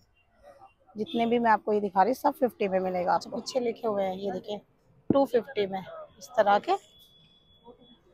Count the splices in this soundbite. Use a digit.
1